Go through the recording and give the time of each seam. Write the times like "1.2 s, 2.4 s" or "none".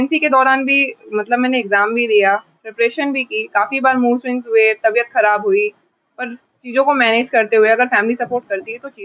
none